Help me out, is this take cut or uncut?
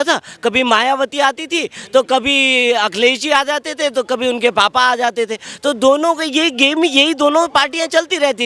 uncut